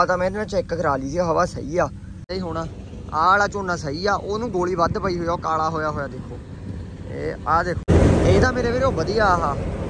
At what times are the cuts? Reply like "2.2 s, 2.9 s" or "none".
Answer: 2.2 s, 7.8 s